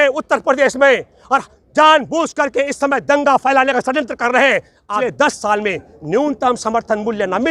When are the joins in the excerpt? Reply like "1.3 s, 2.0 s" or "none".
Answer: 5.0 s